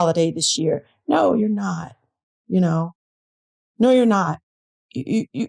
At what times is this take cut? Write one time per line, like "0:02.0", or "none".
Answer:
none